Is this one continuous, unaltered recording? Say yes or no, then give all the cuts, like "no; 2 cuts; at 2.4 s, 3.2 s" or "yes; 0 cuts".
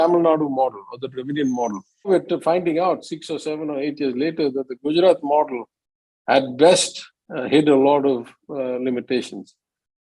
no; 1 cut; at 2.1 s